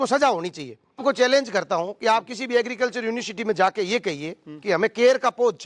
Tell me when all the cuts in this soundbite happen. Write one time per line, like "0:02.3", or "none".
0:01.0